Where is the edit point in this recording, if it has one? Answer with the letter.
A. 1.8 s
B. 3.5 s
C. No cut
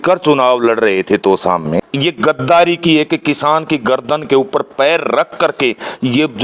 A